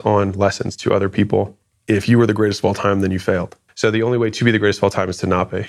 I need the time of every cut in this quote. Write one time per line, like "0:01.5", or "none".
none